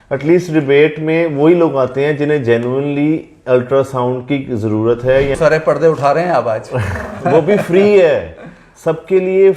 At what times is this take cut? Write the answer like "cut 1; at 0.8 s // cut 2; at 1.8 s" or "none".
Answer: cut 1; at 5.4 s